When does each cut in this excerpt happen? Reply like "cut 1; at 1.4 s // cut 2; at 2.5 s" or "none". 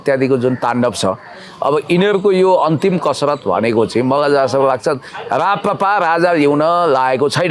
none